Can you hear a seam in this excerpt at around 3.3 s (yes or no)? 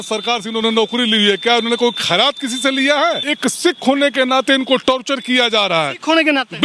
yes